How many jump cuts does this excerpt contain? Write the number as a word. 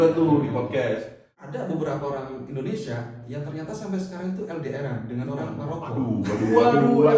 one